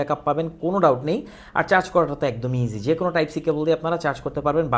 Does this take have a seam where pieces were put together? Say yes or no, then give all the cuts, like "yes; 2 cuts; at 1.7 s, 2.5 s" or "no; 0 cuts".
no; 0 cuts